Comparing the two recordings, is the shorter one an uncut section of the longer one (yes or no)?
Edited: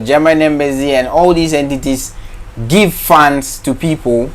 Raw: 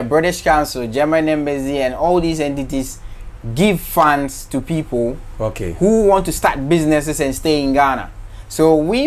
yes